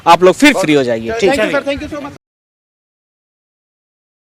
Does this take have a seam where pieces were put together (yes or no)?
no